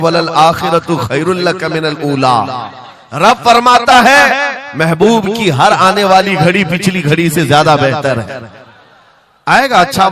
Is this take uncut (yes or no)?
yes